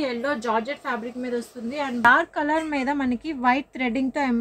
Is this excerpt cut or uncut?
cut